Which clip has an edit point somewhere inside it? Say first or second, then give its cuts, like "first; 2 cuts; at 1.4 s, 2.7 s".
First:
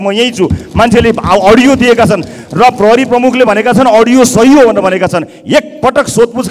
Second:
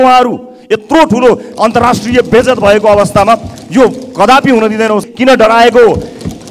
second; 1 cut; at 5.1 s